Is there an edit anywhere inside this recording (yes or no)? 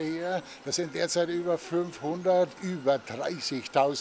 yes